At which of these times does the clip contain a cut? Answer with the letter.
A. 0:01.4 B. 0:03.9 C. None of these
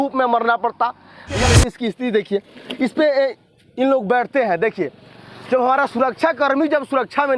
A